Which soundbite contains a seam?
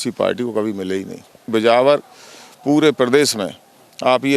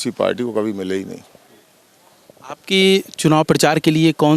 first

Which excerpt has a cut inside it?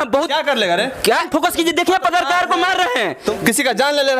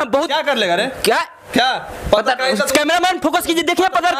first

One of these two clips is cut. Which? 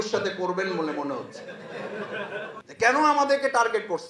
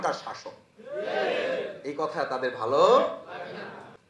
first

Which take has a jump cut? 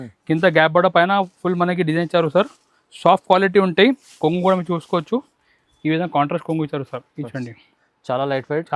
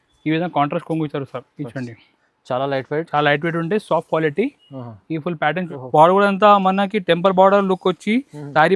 second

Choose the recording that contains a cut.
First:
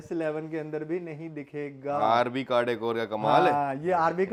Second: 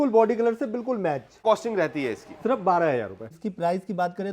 second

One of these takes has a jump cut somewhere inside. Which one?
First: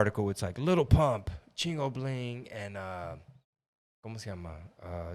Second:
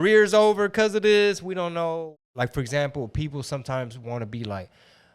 second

